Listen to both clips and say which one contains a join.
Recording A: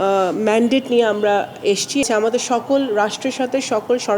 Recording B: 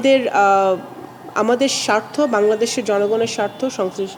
A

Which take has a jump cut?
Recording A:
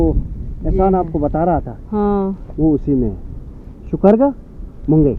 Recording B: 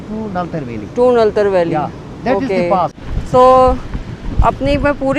B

